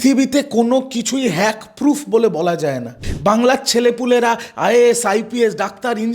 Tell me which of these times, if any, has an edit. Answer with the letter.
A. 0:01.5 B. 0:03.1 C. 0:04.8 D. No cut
B